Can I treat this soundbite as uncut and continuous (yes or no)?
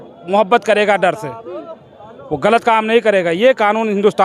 yes